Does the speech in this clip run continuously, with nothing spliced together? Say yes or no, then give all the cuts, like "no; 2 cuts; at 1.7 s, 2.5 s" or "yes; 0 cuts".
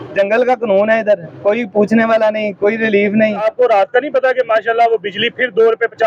no; 1 cut; at 3.4 s